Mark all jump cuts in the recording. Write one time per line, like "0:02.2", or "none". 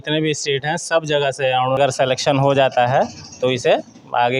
0:01.8

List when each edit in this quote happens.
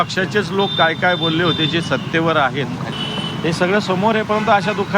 0:03.0

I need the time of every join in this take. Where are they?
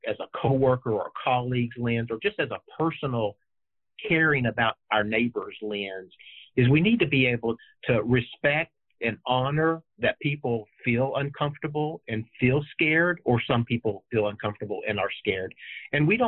0:07.6

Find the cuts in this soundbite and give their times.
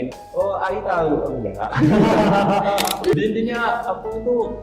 0:03.2

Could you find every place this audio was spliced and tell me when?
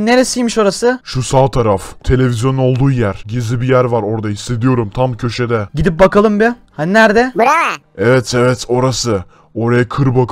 none

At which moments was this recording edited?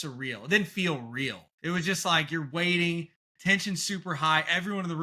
0:01.5

